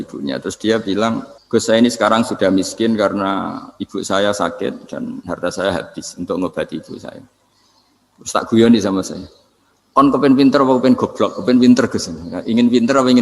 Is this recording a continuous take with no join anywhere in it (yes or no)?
no